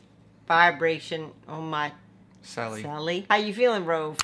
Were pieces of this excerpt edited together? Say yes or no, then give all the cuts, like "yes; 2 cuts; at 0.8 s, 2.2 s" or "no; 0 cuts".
yes; 1 cut; at 3.2 s